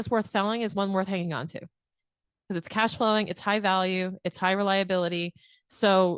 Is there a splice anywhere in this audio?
no; 0 cuts

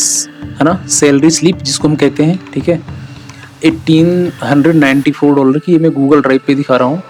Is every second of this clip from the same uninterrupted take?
yes; 0 cuts

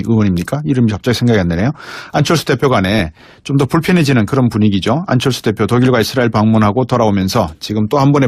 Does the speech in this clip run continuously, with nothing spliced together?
yes; 0 cuts

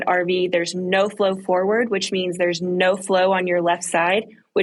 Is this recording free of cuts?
yes; 0 cuts

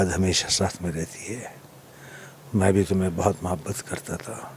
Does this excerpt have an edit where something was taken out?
no; 0 cuts

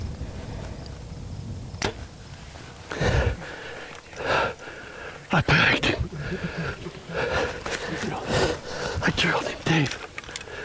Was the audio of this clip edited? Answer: no; 0 cuts

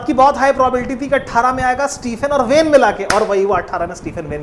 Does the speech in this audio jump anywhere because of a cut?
no; 0 cuts

